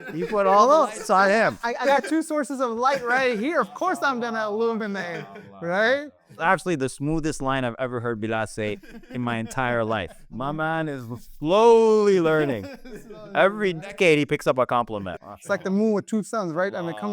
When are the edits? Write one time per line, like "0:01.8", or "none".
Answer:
0:06.4
0:10.2
0:15.2